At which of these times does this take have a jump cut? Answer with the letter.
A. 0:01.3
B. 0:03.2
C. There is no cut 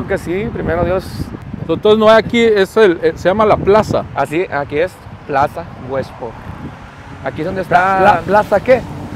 A